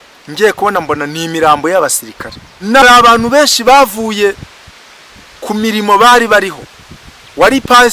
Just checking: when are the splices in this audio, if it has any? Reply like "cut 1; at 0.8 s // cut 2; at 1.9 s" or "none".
cut 1; at 2.8 s